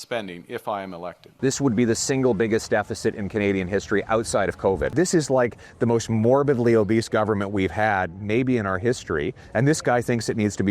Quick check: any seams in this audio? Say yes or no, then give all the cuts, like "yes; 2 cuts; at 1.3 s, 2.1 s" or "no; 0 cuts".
yes; 2 cuts; at 1.2 s, 4.9 s